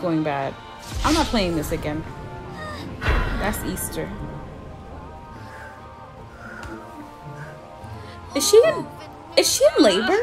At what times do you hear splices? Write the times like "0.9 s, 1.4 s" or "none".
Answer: none